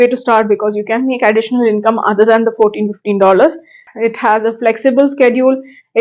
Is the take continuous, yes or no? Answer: no